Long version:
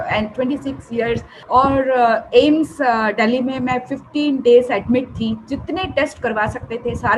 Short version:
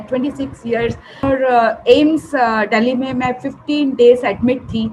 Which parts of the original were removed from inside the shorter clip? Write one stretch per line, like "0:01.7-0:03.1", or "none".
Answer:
0:01.5-0:01.7